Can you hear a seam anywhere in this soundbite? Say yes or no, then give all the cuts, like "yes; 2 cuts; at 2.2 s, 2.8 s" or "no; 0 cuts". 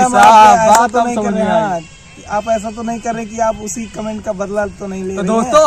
no; 0 cuts